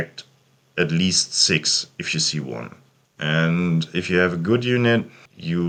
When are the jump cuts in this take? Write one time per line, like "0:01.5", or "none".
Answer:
none